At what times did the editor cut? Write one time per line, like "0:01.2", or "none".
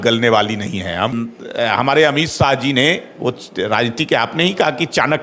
0:01.1